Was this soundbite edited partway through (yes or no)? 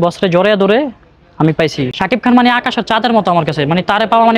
yes